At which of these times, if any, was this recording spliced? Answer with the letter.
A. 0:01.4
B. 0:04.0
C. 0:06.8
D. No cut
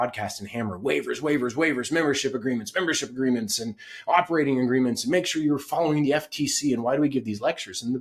D